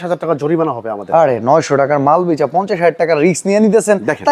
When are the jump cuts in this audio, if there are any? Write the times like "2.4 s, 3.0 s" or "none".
none